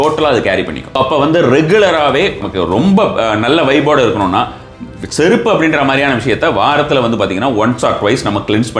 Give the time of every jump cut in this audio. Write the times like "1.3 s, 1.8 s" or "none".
1.0 s, 2.4 s